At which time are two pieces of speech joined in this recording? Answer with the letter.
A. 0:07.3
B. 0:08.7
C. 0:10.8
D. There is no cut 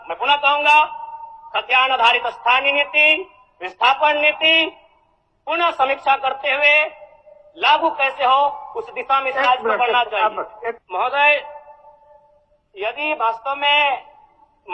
C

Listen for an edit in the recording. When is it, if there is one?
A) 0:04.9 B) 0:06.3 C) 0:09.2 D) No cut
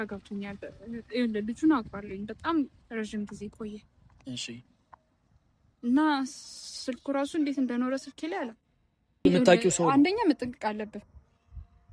C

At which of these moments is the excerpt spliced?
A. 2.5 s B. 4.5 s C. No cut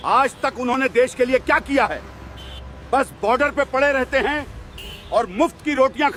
C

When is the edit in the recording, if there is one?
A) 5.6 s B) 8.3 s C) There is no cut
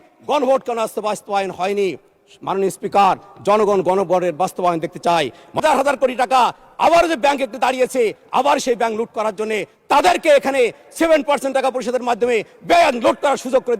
A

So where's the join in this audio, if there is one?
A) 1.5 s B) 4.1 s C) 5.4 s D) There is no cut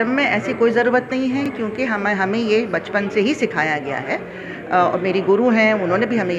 D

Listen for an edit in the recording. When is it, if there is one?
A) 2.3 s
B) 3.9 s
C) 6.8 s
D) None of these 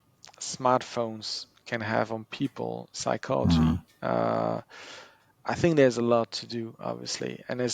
D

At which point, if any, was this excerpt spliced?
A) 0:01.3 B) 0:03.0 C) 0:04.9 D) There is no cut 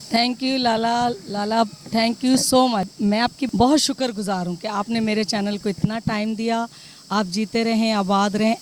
B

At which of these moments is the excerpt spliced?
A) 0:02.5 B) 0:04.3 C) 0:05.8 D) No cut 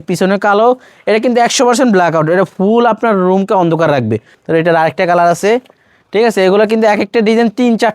B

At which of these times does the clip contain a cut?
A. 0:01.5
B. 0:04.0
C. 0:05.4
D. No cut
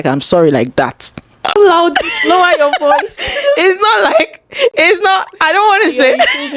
A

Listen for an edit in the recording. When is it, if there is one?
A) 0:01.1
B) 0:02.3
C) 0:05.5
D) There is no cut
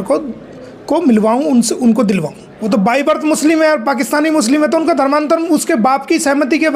B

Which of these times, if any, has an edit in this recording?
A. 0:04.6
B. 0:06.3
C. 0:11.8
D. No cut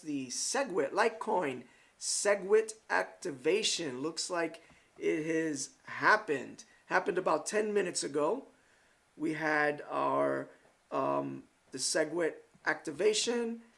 C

